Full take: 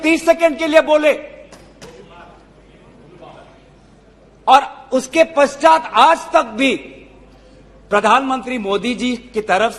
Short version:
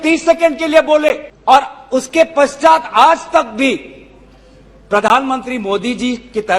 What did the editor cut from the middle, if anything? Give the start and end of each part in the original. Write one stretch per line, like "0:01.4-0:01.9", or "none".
0:01.3-0:04.3